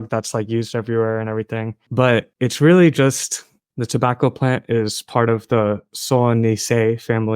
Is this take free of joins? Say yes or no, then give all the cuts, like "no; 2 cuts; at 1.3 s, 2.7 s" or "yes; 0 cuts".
no; 1 cut; at 3.6 s